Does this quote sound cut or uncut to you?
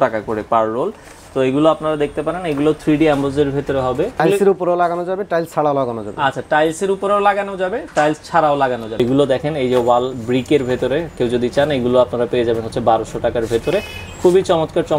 cut